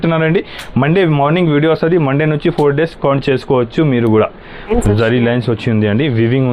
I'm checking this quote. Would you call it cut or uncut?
cut